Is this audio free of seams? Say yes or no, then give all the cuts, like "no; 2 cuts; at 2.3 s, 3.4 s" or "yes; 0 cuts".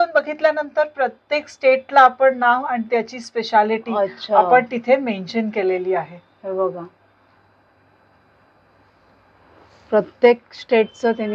yes; 0 cuts